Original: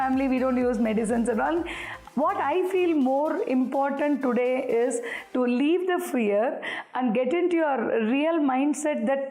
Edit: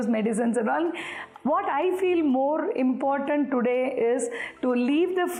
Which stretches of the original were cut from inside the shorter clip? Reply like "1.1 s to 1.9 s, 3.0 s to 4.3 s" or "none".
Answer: none